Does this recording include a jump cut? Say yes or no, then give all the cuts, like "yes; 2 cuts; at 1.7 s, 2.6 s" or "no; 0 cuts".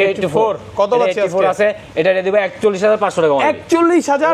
no; 0 cuts